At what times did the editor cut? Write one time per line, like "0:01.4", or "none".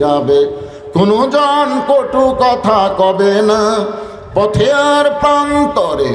none